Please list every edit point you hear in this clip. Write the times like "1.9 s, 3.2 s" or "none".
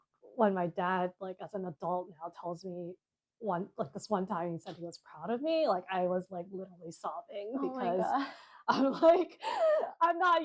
none